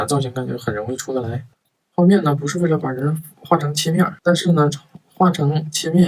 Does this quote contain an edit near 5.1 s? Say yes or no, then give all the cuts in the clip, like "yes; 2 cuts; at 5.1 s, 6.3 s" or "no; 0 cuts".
no; 2 cuts; at 1.2 s, 3.7 s